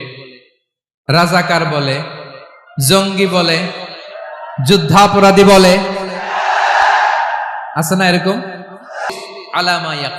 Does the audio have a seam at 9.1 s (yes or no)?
yes